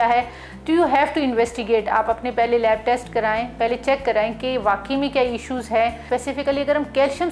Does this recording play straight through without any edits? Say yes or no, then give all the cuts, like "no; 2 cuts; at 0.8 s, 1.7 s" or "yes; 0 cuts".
no; 1 cut; at 6.0 s